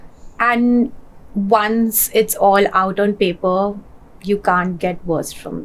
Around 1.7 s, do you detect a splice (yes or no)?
no